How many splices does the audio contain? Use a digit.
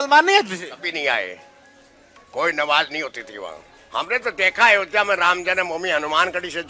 1